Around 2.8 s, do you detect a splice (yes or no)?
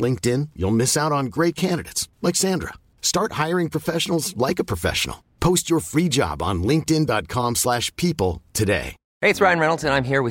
no